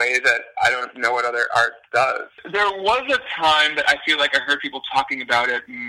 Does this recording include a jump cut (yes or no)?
yes